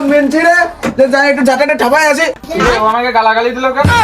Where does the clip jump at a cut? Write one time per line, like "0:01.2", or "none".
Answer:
0:02.4